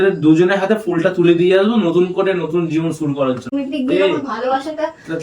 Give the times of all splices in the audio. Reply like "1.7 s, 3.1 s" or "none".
3.5 s